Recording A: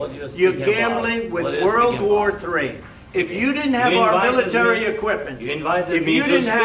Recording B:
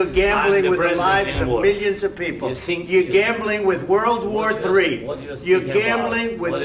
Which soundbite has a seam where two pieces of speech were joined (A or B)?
A